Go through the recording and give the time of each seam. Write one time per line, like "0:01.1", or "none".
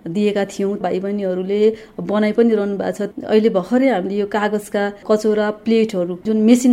0:00.8
0:03.1